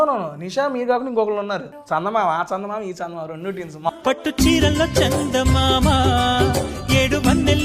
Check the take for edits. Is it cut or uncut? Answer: cut